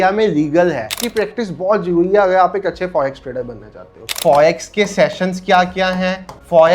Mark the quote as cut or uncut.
cut